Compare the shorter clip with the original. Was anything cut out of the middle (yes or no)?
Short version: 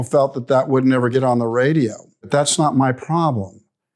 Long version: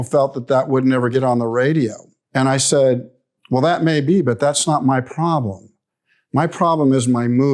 yes